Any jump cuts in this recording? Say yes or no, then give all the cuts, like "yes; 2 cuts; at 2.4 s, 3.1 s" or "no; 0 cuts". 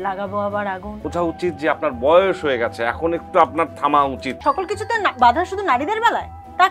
yes; 2 cuts; at 1.0 s, 4.3 s